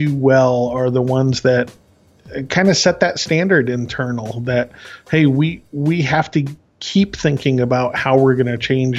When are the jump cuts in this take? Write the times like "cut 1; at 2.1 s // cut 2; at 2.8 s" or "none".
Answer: none